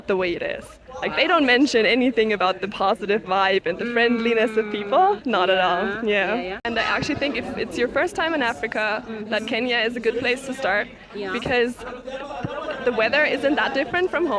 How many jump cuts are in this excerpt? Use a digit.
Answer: 1